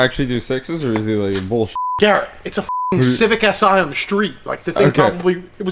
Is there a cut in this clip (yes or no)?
no